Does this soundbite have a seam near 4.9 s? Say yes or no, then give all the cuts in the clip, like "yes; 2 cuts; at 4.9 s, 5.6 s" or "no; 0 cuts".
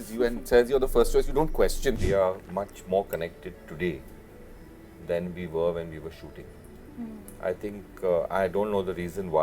no; 1 cut; at 2.0 s